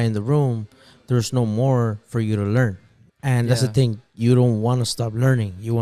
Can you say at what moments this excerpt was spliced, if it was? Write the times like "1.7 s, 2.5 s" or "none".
none